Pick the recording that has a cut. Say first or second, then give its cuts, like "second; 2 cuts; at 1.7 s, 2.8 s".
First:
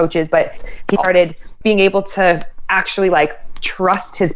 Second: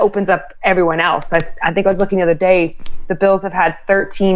first; 1 cut; at 1.5 s